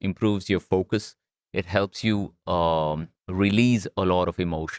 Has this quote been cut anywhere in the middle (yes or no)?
no